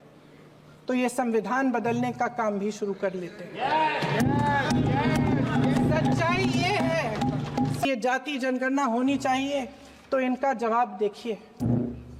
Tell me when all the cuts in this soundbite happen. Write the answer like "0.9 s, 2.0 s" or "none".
7.9 s